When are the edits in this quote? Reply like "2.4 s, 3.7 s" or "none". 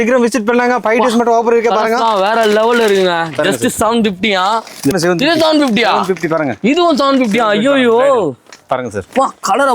4.9 s